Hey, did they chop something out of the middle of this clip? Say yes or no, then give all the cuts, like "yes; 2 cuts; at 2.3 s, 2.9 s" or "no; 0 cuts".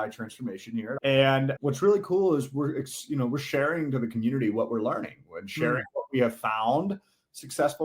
yes; 1 cut; at 0.9 s